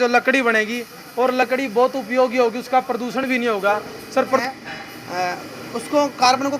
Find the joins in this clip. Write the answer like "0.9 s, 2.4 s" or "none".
4.4 s